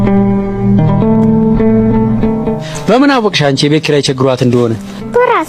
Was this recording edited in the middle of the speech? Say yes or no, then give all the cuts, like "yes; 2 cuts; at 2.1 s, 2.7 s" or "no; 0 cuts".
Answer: no; 0 cuts